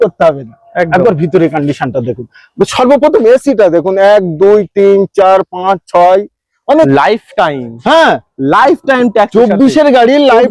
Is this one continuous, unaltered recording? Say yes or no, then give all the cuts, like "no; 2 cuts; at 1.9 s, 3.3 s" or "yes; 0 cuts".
no; 1 cut; at 6.9 s